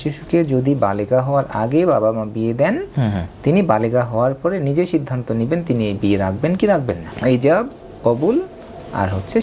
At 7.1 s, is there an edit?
yes; 1 cut; at 7.1 s

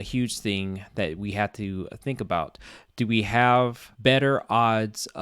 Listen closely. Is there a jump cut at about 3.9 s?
yes; 1 cut; at 3.9 s

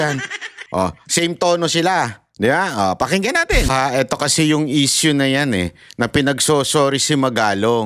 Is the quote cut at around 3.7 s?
yes; 1 cut; at 3.7 s

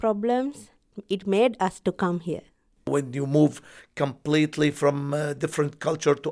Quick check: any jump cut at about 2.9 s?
yes; 1 cut; at 2.9 s

